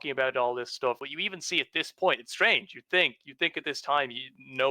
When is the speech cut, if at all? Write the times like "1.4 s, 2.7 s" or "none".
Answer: 1.0 s

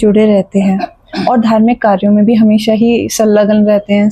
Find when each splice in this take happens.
none

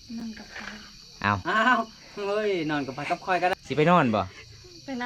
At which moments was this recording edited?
3.5 s

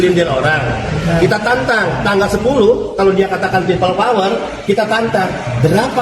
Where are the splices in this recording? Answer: none

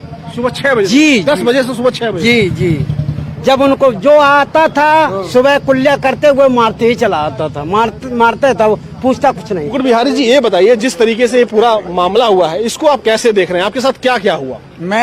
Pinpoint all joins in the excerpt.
9.7 s

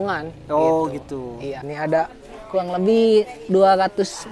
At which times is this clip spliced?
1.7 s

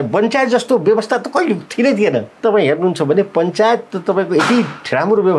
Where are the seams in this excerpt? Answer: 2.4 s

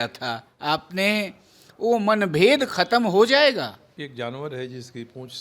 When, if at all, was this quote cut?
3.9 s

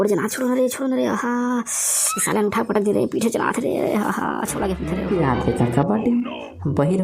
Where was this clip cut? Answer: 5.0 s

